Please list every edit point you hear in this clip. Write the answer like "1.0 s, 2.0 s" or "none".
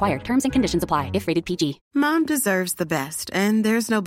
1.8 s

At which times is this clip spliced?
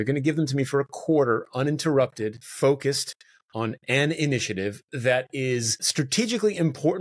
2.4 s

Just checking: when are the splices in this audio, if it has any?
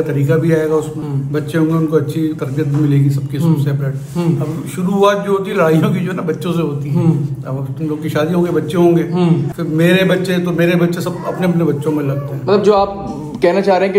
none

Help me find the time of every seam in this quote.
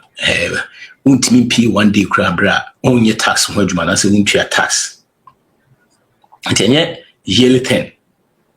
2.7 s

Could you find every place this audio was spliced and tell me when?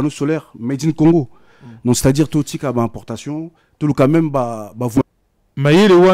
5.0 s

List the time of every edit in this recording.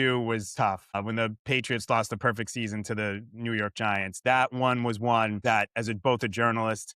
1.0 s, 5.4 s

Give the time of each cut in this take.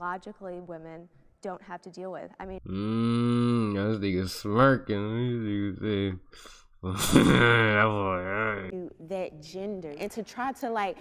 8.7 s

